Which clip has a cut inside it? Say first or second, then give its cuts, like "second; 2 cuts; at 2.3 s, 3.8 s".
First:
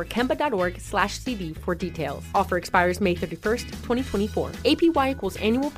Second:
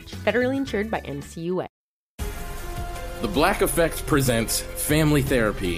second; 1 cut; at 1.8 s